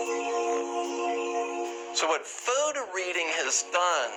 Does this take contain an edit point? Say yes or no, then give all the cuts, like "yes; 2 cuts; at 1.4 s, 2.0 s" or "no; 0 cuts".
no; 0 cuts